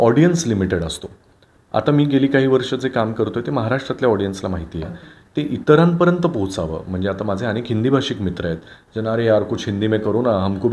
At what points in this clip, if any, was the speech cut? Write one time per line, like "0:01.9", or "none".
none